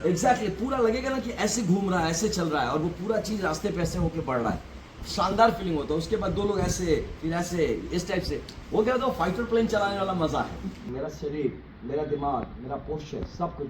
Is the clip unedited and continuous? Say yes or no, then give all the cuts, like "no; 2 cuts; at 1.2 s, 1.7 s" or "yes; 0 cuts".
no; 1 cut; at 10.9 s